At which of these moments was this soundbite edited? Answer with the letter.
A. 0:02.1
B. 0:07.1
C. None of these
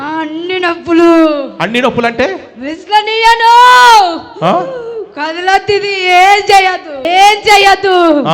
B